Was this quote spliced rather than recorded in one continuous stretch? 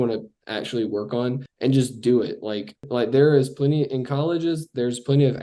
yes; 2 cuts; at 1.5 s, 2.9 s

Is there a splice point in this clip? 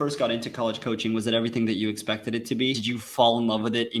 yes; 1 cut; at 2.8 s

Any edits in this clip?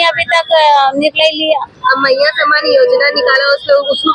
no; 0 cuts

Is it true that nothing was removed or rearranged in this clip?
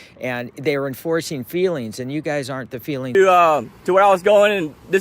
no; 1 cut; at 3.1 s

